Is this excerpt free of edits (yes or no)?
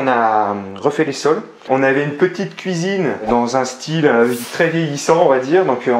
no